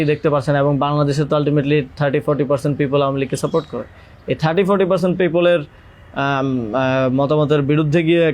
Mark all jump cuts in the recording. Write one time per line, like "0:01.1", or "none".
none